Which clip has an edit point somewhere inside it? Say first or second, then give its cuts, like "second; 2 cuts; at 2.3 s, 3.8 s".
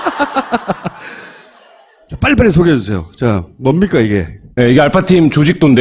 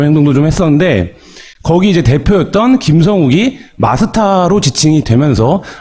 second; 1 cut; at 2.2 s